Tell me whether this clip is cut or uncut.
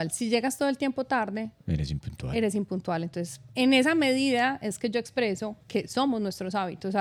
uncut